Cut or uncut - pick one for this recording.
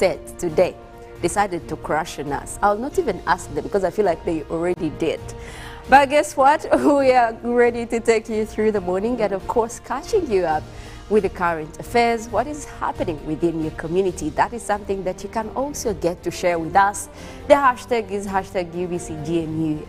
uncut